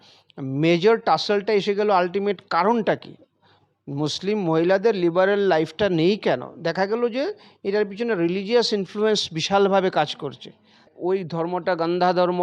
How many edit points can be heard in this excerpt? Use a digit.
1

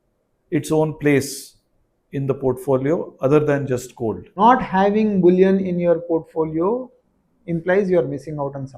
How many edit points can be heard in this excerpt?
1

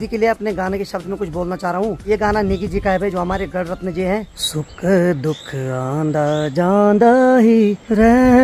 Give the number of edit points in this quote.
0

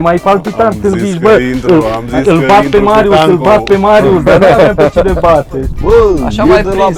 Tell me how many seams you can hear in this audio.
1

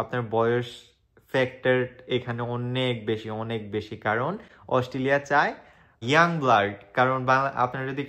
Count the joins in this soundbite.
0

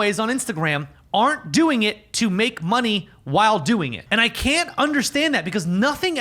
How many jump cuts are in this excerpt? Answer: 1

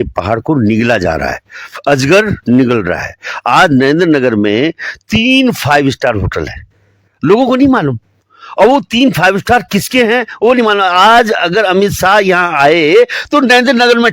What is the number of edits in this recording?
0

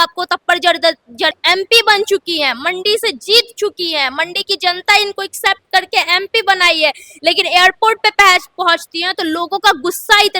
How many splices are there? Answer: 1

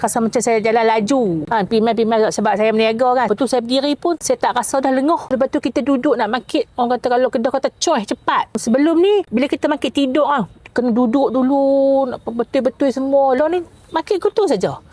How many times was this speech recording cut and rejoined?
3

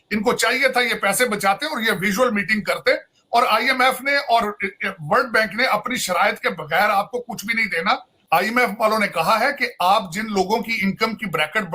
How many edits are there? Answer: 1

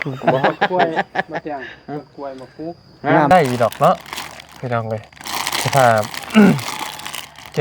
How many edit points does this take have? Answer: 1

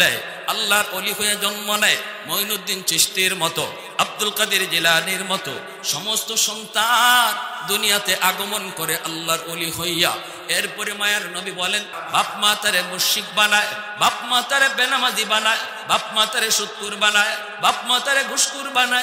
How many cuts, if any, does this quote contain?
1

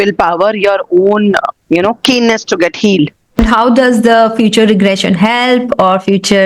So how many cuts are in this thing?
1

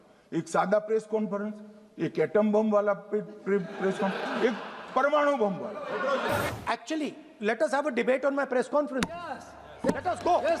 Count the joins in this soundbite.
1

